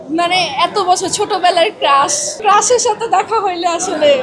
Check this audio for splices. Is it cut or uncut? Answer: cut